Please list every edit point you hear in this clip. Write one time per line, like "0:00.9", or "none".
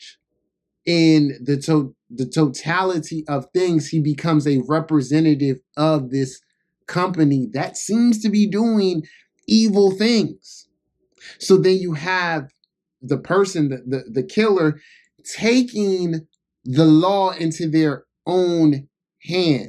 0:13.0